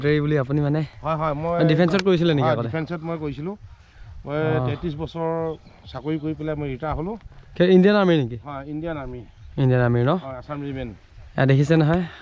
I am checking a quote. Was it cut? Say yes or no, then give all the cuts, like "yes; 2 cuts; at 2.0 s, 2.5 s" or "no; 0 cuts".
no; 0 cuts